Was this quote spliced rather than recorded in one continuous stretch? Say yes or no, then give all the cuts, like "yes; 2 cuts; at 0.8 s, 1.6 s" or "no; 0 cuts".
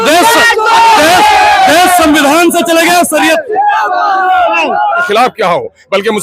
yes; 1 cut; at 5.1 s